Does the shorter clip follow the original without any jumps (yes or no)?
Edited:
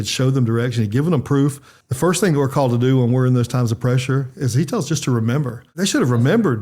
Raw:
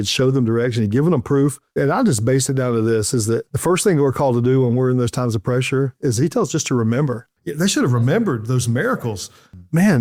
no